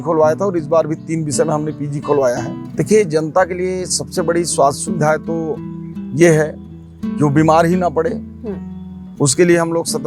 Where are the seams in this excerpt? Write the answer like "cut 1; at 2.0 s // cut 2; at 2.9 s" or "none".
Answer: cut 1; at 2.6 s

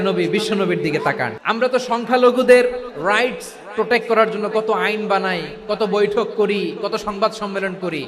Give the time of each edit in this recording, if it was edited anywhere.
cut 1; at 1.3 s

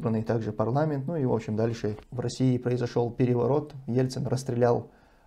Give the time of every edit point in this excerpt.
cut 1; at 2.1 s

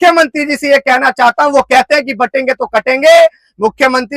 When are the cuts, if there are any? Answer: none

